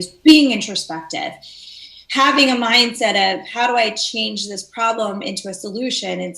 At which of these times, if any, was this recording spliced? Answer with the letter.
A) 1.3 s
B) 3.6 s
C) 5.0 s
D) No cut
D